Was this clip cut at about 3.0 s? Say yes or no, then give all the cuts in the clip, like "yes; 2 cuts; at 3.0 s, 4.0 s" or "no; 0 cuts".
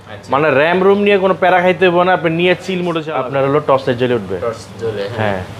yes; 1 cut; at 3.0 s